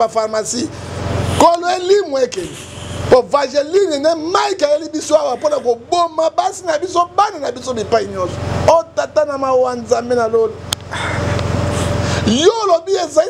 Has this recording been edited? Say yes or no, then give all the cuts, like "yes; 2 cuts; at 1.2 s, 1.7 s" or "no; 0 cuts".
no; 0 cuts